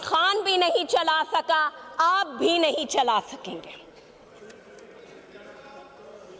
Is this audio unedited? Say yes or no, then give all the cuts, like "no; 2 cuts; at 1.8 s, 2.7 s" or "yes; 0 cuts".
yes; 0 cuts